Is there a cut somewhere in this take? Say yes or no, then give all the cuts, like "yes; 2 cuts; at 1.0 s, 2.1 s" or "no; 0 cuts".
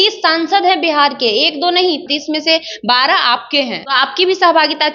yes; 2 cuts; at 2.0 s, 3.8 s